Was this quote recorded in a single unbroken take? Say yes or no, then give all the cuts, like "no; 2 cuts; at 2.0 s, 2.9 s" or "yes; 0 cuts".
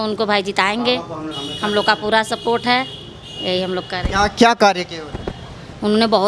yes; 0 cuts